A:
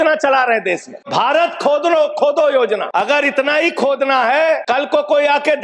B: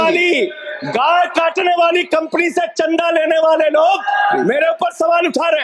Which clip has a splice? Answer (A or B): A